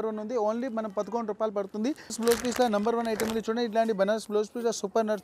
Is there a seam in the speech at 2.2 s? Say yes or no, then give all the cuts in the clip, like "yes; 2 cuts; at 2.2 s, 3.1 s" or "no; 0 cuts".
yes; 1 cut; at 2.2 s